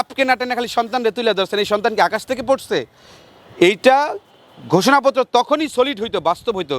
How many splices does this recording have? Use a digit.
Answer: 0